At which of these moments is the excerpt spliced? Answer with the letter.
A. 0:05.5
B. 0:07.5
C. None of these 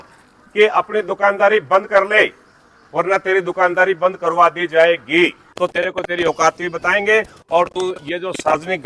A